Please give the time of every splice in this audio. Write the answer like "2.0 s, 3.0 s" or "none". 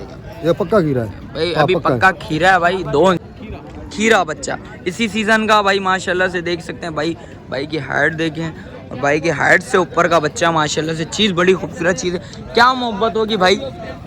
3.2 s